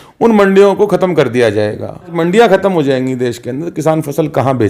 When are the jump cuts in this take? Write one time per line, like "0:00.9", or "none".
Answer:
0:02.1

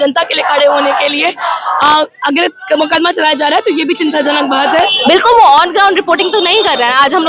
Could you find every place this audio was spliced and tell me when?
0:04.9

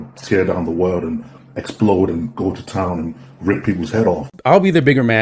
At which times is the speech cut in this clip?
0:04.3

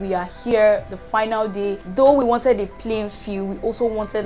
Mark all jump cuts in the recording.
0:01.8

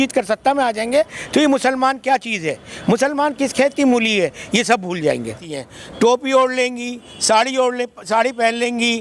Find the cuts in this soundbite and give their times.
0:05.4

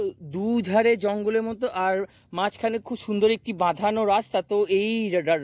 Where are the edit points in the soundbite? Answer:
none

